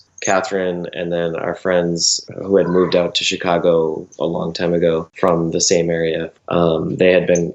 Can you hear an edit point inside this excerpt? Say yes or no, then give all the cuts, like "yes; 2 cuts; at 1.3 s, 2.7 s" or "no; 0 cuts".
no; 0 cuts